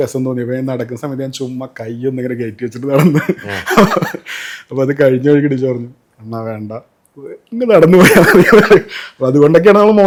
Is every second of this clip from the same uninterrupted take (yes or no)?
yes